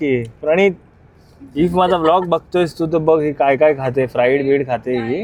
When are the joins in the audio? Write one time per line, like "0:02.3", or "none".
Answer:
none